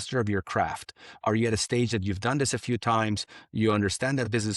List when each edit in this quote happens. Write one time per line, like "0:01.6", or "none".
none